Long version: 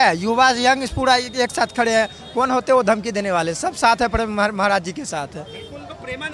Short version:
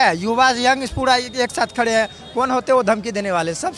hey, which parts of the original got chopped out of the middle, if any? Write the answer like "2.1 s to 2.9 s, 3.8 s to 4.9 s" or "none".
none